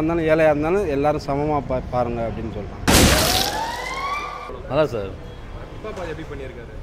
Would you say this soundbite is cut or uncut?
cut